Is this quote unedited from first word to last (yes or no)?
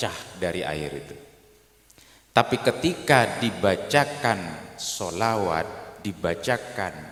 yes